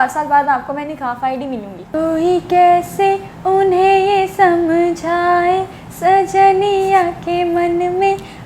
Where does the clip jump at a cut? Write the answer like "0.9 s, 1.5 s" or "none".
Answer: 1.8 s